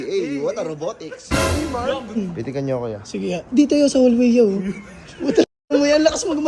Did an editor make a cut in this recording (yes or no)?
no